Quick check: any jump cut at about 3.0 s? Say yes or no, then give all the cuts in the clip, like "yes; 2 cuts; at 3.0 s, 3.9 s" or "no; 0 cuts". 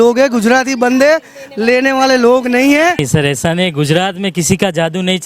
yes; 1 cut; at 3.0 s